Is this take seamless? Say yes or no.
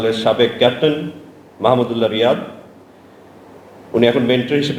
yes